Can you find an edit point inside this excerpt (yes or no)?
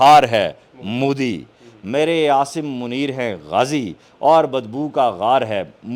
no